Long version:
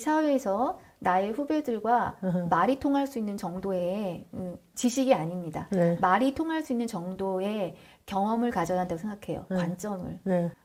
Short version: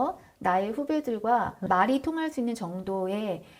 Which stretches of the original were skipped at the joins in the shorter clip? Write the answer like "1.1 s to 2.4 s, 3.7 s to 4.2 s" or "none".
2.2 s to 6.0 s

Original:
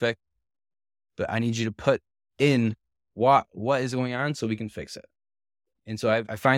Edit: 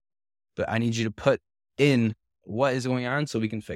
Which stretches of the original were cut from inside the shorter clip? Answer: 3.1 s to 3.5 s

